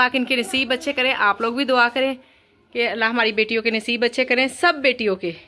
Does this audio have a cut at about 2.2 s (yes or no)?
no